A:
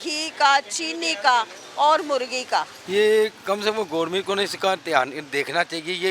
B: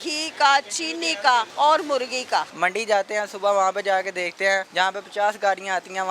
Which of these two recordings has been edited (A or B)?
B